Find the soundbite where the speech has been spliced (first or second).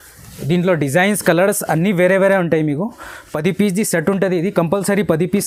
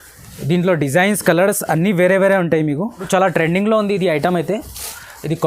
second